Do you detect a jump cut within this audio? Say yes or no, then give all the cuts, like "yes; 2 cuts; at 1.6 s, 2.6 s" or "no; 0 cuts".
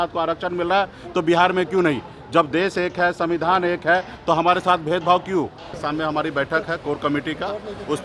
yes; 1 cut; at 5.8 s